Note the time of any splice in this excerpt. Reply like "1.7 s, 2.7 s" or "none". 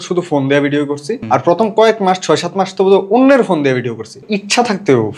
1.1 s, 4.2 s